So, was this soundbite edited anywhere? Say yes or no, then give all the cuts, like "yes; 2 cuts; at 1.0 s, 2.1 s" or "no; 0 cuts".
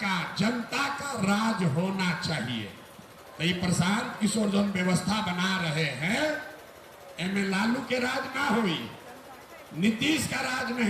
no; 0 cuts